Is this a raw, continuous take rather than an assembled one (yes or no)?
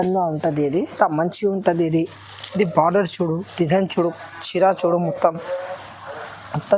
no